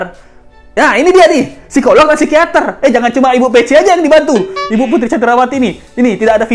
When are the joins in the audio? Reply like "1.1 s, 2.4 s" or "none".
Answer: none